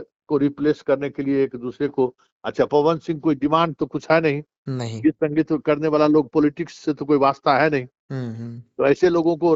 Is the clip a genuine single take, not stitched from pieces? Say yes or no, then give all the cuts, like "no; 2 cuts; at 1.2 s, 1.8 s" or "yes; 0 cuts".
yes; 0 cuts